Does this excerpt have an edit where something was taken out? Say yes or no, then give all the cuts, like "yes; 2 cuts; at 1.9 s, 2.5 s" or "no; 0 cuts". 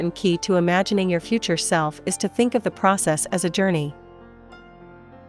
no; 0 cuts